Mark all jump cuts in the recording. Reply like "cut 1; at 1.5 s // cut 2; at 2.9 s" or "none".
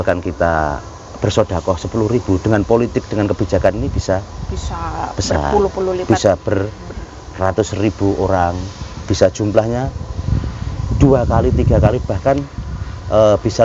none